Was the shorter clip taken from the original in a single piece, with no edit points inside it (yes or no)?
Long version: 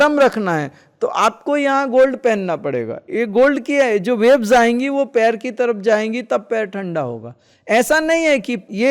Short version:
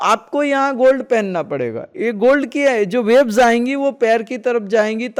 yes